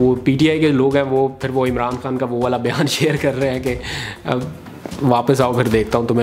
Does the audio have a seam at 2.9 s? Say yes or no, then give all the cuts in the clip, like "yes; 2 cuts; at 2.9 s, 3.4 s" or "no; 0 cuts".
no; 0 cuts